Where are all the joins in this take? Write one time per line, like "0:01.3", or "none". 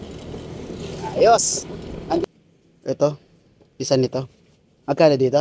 0:02.2